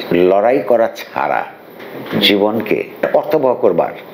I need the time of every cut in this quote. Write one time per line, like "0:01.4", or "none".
0:02.9